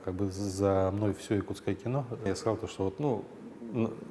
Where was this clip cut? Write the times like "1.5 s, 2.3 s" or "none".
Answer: 2.3 s